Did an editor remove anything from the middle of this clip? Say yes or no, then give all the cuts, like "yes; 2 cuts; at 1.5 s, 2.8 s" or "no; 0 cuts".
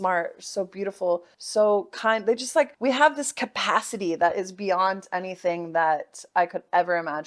yes; 2 cuts; at 1.4 s, 2.7 s